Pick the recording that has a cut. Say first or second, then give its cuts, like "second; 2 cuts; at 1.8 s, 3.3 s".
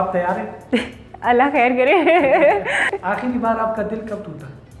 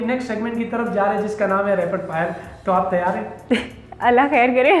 first; 1 cut; at 2.9 s